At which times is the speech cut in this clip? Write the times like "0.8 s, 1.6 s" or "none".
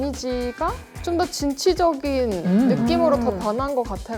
none